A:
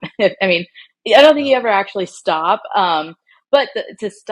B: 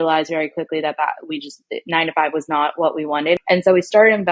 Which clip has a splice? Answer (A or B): B